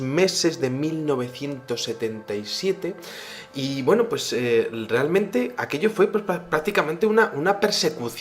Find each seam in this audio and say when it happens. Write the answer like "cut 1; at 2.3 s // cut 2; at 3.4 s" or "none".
cut 1; at 4.0 s